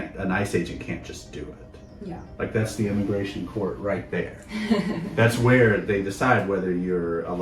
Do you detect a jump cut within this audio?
no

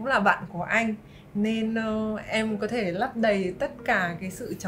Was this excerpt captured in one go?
yes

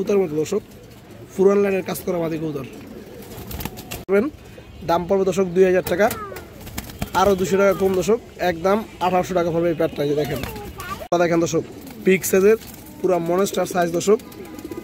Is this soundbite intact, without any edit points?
no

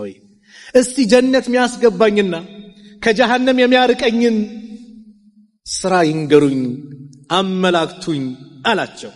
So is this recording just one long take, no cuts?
yes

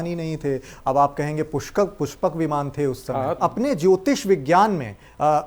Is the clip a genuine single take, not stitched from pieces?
no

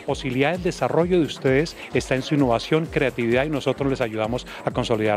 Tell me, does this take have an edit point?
no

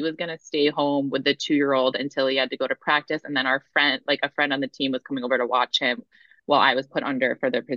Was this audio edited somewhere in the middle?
no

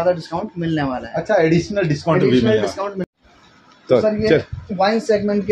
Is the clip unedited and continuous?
no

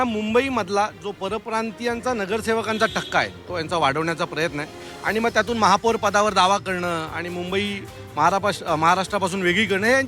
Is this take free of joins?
yes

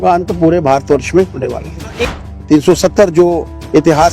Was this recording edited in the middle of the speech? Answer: yes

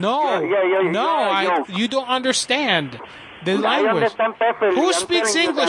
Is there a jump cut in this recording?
no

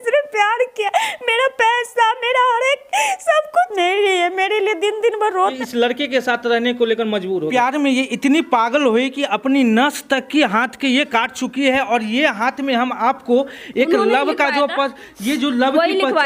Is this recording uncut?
yes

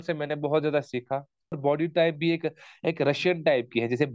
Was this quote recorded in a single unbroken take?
no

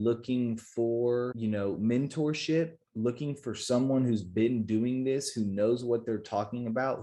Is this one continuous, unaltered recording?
no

